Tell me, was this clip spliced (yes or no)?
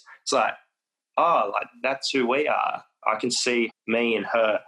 yes